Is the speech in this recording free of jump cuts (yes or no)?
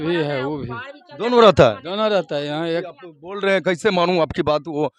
no